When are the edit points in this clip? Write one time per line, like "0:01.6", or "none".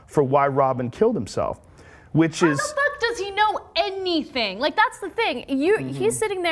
0:02.4